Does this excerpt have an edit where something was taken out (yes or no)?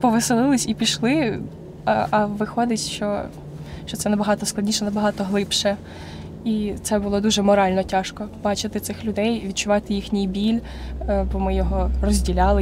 no